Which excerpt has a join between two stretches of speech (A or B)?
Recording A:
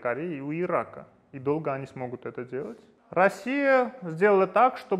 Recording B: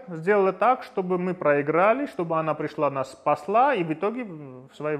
A